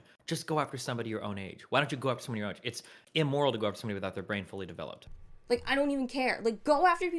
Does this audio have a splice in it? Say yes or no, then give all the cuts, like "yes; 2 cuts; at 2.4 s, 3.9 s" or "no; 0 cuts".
yes; 1 cut; at 5.0 s